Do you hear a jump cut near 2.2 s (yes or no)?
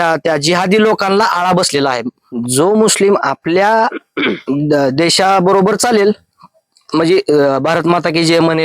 yes